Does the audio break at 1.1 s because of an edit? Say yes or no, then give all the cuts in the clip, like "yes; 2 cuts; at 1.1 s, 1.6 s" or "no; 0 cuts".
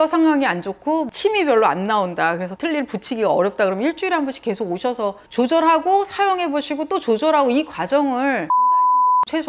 yes; 1 cut; at 1.1 s